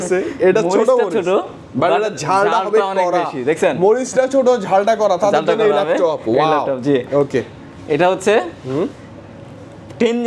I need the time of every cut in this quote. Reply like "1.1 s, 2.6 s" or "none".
none